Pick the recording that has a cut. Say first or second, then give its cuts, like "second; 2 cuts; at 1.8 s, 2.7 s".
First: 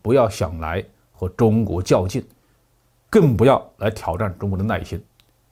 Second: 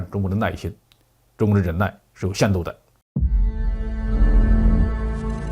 second; 1 cut; at 2.9 s